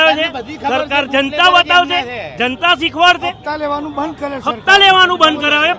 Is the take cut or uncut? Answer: uncut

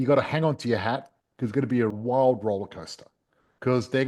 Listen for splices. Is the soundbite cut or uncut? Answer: cut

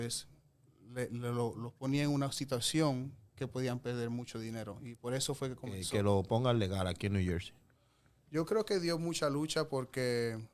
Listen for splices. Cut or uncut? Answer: cut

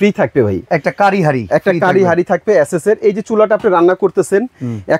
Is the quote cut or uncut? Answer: uncut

